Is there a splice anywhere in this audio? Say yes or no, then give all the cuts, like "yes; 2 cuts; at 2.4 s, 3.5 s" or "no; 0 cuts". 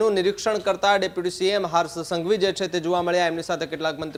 no; 0 cuts